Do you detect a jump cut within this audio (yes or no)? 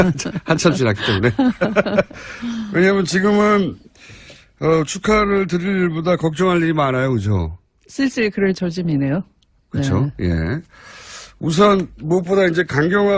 no